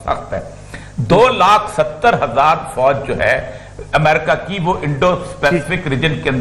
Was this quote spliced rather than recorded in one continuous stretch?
no; 0 cuts

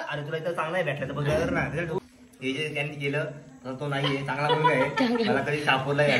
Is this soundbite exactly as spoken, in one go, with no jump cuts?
no; 1 cut; at 2.0 s

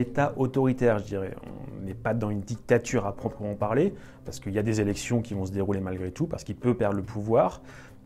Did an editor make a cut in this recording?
no; 0 cuts

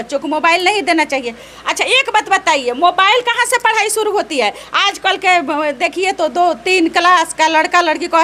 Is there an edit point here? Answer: no; 0 cuts

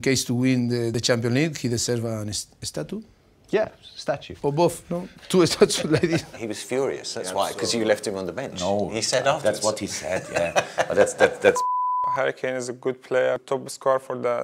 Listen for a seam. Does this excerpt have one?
yes; 5 cuts; at 0.9 s, 4.3 s, 6.3 s, 12.1 s, 13.4 s

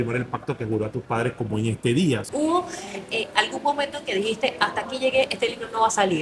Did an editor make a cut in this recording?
yes; 1 cut; at 2.3 s

